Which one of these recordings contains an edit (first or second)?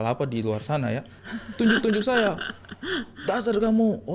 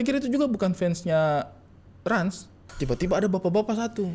second